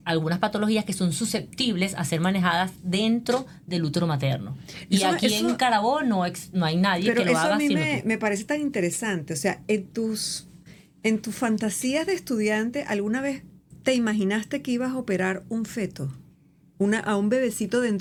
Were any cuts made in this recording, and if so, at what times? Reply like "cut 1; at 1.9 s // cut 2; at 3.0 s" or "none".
none